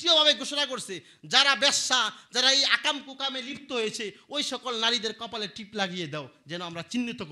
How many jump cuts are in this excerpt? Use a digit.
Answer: 0